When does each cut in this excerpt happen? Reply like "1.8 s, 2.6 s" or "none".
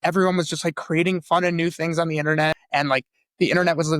2.6 s